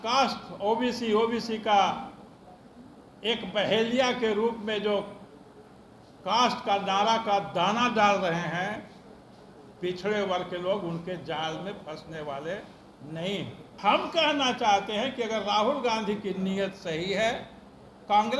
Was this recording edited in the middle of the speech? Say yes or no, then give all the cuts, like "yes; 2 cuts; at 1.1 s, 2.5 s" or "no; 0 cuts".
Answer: yes; 1 cut; at 13.7 s